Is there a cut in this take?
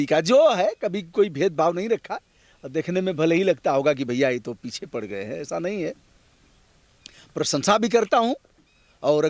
no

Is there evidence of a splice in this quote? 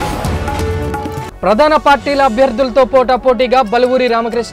no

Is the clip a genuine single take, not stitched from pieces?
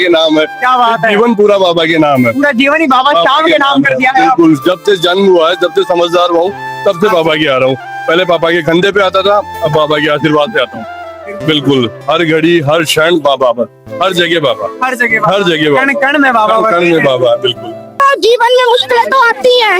no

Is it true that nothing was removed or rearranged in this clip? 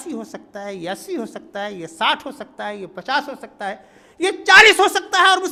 yes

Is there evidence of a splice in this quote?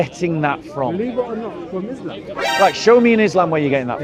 no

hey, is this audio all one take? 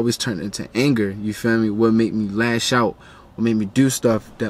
yes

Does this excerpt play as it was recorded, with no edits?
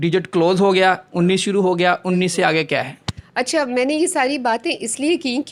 yes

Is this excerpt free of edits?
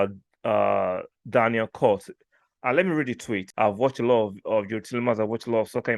no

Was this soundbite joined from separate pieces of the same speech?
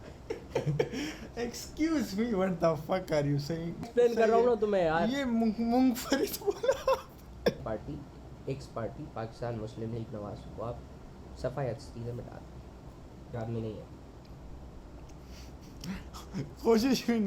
yes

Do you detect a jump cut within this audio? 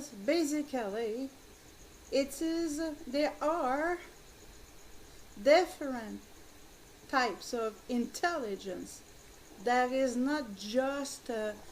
yes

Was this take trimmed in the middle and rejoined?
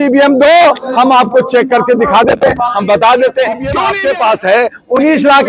yes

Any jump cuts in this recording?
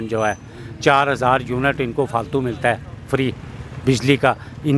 no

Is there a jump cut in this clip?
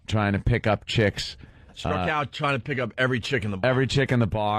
yes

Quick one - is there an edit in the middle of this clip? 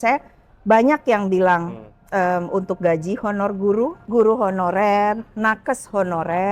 yes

